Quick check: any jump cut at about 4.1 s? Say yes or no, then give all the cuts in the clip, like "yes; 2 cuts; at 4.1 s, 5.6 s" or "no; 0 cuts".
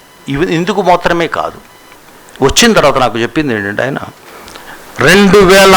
yes; 1 cut; at 4.1 s